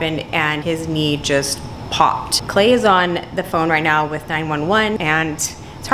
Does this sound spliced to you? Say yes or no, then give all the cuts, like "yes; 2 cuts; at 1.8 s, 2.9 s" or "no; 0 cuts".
yes; 2 cuts; at 2.3 s, 5.0 s